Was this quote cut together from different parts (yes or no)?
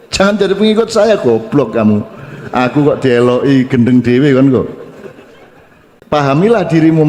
yes